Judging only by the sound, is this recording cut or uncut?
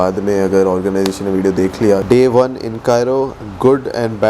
cut